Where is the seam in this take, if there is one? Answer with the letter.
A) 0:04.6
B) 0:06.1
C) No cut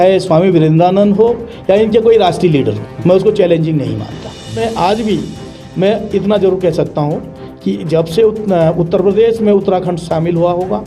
A